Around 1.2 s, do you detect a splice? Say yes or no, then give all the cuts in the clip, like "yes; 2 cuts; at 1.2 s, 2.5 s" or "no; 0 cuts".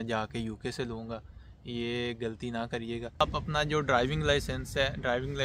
no; 1 cut; at 3.2 s